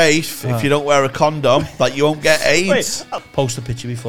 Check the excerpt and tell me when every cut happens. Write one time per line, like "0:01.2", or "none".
0:03.1